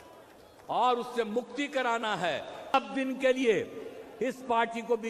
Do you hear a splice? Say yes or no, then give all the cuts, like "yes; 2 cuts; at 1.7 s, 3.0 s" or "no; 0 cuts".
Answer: yes; 1 cut; at 2.7 s